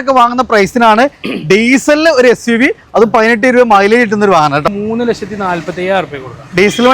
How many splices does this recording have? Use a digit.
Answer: 1